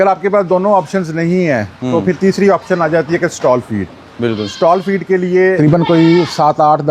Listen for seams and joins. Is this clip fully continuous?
no; 1 cut; at 5.6 s

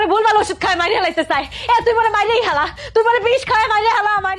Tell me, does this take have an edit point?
no; 0 cuts

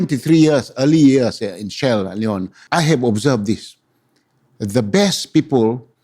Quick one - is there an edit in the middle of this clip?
yes; 1 cut; at 2.5 s

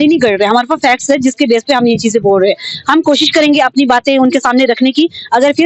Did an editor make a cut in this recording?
no; 0 cuts

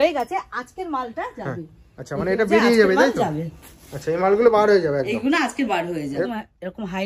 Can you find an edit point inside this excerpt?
yes; 1 cut; at 6.0 s

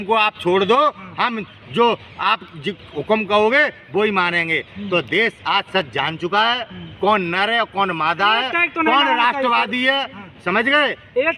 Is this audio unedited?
yes; 0 cuts

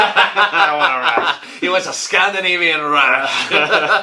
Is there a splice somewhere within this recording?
no; 0 cuts

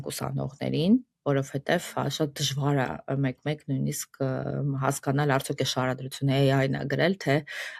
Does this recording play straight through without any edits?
yes; 0 cuts

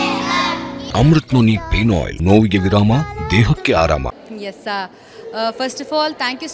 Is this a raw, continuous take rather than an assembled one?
no; 3 cuts; at 0.8 s, 2.1 s, 4.1 s

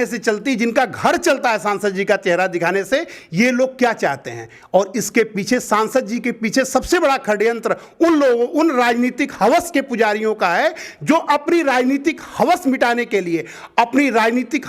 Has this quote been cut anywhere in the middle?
no; 0 cuts

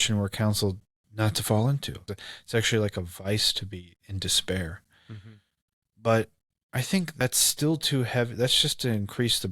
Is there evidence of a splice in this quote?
yes; 2 cuts; at 2.1 s, 7.1 s

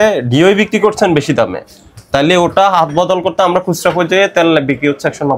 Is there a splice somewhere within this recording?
no; 0 cuts

